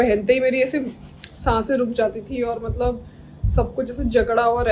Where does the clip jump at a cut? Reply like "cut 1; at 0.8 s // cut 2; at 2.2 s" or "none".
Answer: none